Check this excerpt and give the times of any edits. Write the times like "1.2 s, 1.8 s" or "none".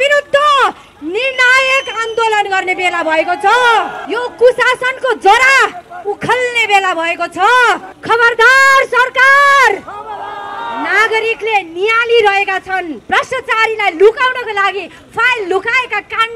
4.0 s, 7.9 s, 13.0 s